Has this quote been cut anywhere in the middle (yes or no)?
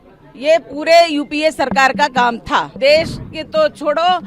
yes